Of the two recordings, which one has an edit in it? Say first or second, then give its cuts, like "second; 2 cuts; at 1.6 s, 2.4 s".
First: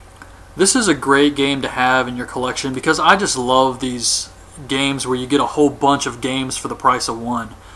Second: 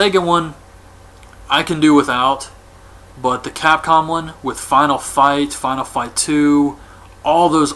first; 1 cut; at 3.1 s